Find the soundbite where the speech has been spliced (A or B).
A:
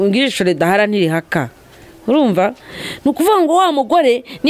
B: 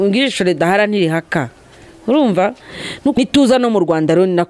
B